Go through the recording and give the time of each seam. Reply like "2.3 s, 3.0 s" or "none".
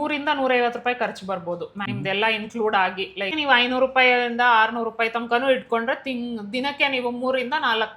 1.8 s, 3.3 s